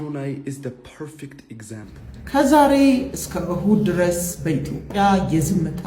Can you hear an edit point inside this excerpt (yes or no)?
yes